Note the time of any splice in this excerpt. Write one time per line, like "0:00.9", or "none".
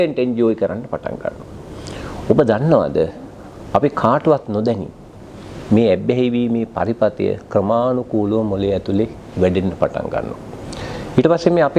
none